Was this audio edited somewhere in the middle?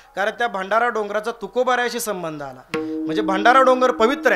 no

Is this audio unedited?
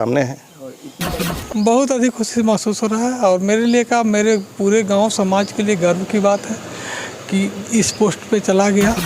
no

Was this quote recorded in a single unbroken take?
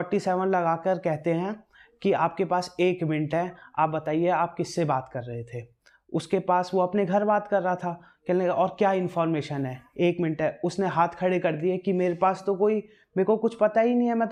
yes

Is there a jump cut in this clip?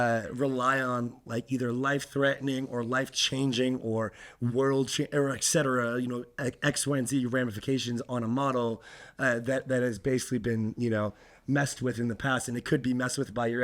no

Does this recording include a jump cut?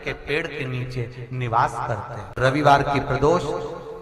yes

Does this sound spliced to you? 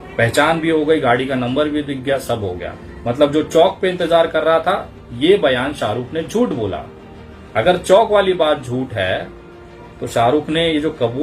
no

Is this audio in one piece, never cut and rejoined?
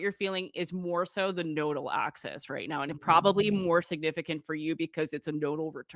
yes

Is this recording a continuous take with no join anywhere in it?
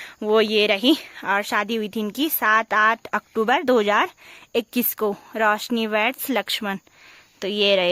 yes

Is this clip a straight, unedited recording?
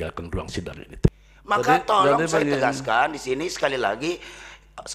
no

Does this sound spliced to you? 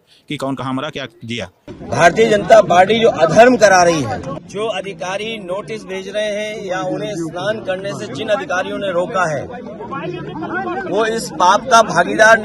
yes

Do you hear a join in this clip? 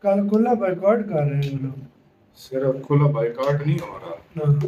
no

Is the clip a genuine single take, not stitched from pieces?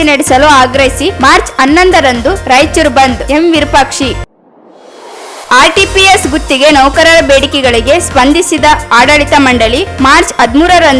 yes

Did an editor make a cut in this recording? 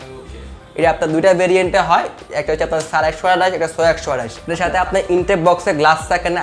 yes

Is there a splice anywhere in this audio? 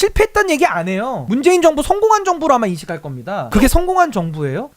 yes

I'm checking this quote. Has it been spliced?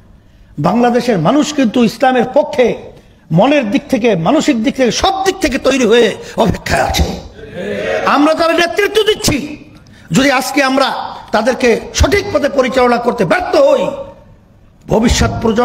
no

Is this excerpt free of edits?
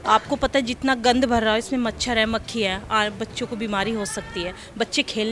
yes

